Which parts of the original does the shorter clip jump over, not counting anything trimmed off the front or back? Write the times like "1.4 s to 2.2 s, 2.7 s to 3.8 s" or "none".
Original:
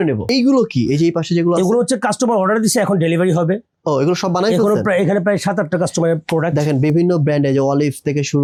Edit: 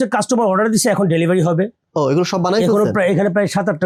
none

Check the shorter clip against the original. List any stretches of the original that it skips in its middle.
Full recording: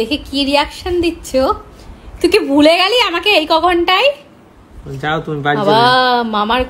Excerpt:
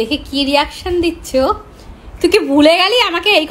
none

